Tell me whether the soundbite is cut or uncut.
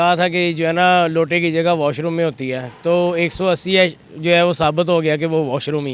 uncut